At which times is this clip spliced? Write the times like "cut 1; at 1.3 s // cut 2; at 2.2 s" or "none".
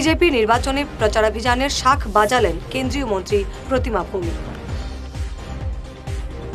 none